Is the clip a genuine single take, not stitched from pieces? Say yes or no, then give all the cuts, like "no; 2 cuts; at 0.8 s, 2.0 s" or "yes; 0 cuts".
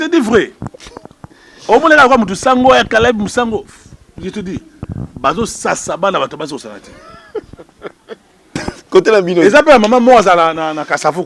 no; 1 cut; at 8.6 s